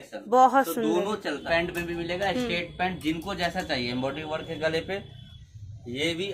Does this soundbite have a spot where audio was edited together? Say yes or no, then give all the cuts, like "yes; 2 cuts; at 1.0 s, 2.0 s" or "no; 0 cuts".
yes; 2 cuts; at 1.4 s, 5.4 s